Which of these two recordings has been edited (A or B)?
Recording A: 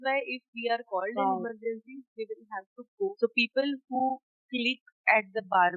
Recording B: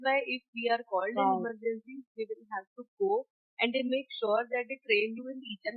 A